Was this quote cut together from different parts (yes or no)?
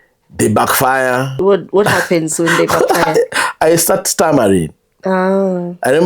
yes